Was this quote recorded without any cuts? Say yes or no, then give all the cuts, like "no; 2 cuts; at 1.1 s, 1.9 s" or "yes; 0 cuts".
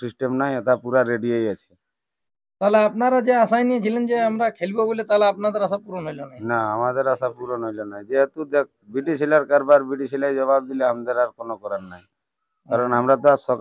yes; 0 cuts